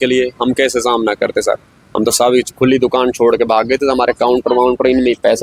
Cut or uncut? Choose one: uncut